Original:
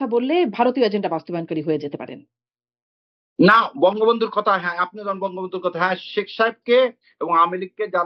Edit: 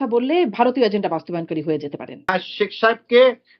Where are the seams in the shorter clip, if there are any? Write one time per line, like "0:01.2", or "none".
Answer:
0:02.3